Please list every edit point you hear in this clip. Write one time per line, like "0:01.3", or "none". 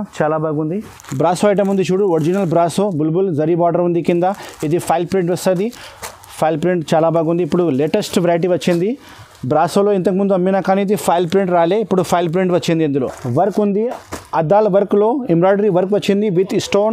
0:01.0
0:13.2